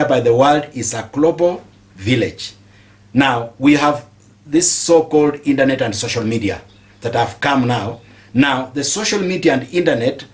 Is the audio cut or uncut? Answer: uncut